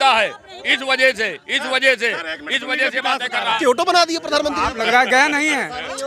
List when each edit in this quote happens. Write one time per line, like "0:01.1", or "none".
0:03.6